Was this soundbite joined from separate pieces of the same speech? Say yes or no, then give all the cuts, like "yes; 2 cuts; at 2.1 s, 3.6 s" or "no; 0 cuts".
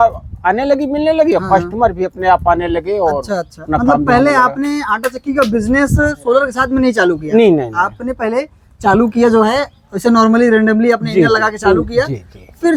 no; 0 cuts